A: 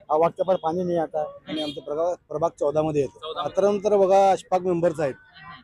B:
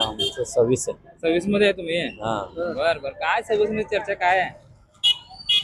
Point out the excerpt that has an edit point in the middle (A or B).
A